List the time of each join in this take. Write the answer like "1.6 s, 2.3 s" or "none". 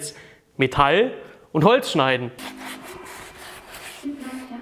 2.3 s